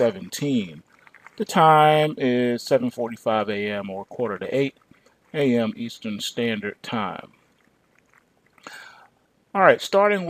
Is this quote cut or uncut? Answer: cut